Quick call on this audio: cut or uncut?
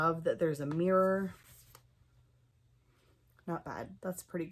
uncut